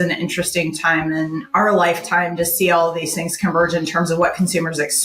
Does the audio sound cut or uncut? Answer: cut